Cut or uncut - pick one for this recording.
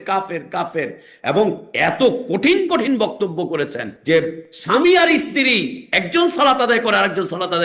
cut